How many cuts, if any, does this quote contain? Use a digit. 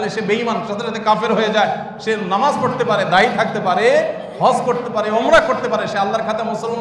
0